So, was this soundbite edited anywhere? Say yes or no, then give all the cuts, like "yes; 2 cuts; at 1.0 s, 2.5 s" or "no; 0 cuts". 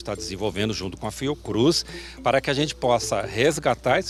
no; 0 cuts